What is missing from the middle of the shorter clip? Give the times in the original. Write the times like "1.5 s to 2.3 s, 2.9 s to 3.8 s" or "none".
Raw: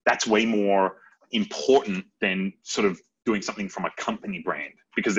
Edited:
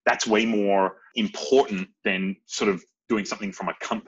1.0 s to 1.2 s